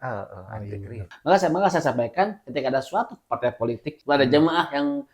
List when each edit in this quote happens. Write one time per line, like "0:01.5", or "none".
0:01.0
0:03.9